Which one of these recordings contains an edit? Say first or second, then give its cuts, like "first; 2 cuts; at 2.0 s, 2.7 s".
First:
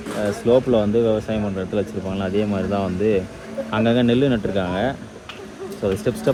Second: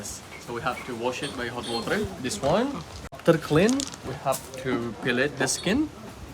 second; 1 cut; at 3.2 s